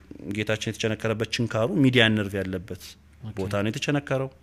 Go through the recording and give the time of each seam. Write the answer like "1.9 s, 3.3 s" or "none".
none